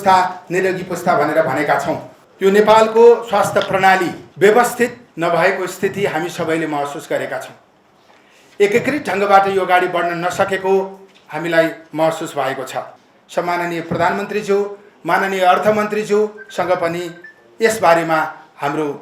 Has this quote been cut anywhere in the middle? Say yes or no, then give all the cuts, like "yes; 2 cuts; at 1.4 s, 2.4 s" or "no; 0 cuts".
yes; 4 cuts; at 2.2 s, 4.2 s, 5.0 s, 12.9 s